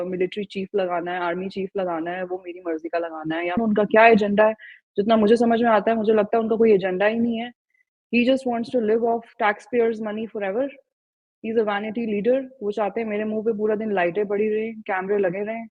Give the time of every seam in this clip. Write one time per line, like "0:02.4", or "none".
0:03.6